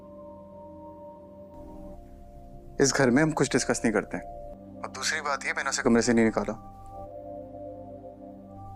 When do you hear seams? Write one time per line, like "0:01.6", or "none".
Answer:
none

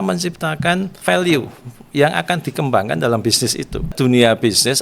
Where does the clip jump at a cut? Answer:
0:00.9
0:03.9

